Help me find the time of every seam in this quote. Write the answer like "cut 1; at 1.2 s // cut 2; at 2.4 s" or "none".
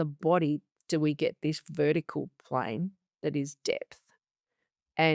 none